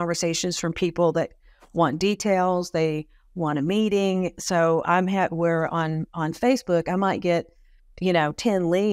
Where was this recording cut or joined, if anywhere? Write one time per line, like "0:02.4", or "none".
none